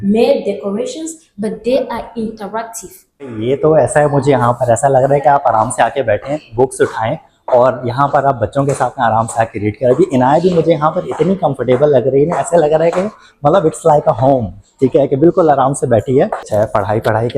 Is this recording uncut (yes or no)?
no